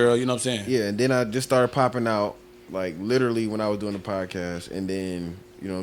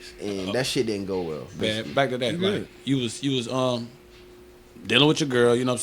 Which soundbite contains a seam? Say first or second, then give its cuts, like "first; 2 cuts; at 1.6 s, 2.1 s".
second; 1 cut; at 1.6 s